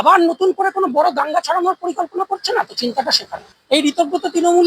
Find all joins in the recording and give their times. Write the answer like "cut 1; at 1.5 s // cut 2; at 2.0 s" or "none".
cut 1; at 3.5 s